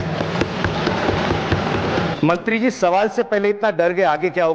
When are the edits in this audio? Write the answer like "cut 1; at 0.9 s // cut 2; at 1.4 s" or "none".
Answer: cut 1; at 2.1 s

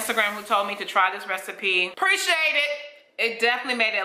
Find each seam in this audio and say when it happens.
cut 1; at 1.9 s

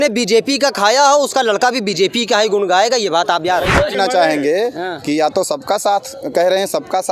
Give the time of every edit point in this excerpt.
cut 1; at 3.9 s

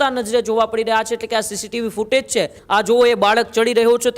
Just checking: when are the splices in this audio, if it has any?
cut 1; at 2.6 s

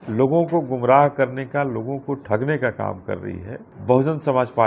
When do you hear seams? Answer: cut 1; at 3.7 s

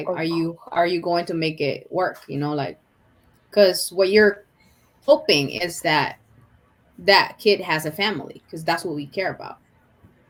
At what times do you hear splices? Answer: none

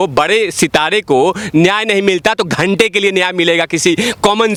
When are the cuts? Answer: none

